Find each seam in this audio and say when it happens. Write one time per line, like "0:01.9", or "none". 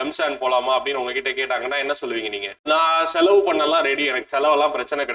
0:02.5